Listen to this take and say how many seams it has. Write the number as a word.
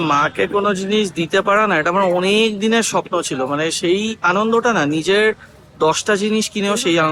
zero